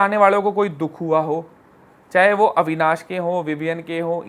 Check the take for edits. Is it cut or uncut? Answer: uncut